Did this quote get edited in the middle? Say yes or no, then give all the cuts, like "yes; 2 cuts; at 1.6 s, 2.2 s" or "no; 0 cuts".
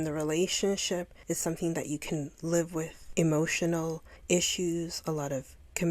yes; 3 cuts; at 1.1 s, 3.1 s, 4.1 s